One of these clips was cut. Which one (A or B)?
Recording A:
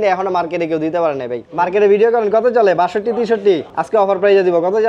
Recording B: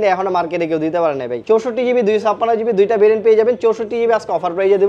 A